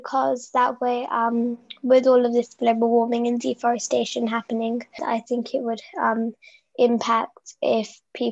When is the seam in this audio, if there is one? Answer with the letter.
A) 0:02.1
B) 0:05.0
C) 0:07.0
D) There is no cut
B